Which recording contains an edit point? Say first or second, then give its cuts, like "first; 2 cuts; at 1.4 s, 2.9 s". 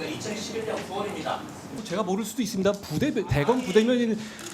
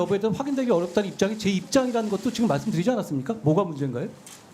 first; 1 cut; at 1.8 s